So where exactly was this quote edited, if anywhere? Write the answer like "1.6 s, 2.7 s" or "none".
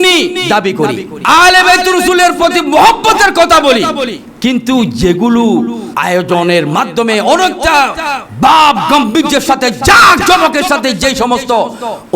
1.1 s, 5.9 s